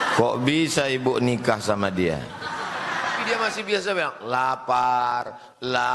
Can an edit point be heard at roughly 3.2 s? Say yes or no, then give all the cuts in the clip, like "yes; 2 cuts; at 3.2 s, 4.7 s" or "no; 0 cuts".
yes; 1 cut; at 3.2 s